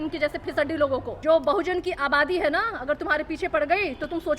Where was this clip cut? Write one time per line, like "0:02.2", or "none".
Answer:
0:01.2